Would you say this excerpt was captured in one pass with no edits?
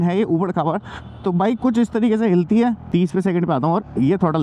no; 1 cut; at 2.8 s

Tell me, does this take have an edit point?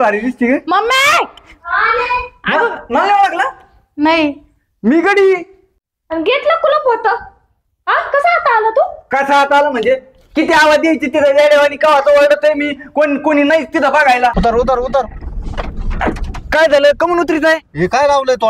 yes; 2 cuts; at 5.9 s, 14.4 s

